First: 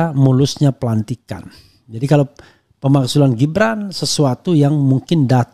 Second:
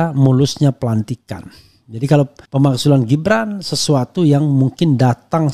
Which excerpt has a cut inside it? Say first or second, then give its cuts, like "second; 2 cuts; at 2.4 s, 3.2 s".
second; 1 cut; at 2.4 s